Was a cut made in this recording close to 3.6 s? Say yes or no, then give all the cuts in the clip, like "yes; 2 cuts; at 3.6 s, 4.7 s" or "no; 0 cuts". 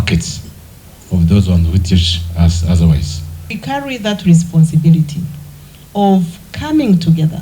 yes; 1 cut; at 3.6 s